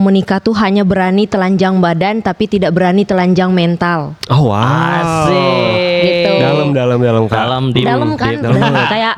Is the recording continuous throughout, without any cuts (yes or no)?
yes